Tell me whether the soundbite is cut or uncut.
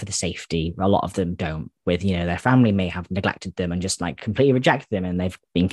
uncut